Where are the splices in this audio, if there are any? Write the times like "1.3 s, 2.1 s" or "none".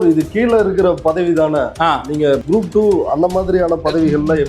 2.4 s